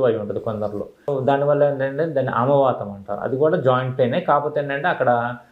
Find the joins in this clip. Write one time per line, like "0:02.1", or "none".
0:01.0